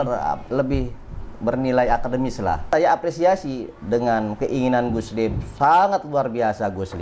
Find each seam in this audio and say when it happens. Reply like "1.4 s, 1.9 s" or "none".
2.7 s